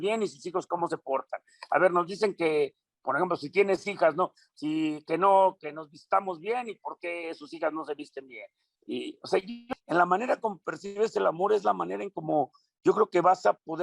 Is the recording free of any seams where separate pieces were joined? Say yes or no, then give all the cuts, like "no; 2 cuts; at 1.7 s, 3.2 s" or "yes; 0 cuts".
no; 1 cut; at 9.6 s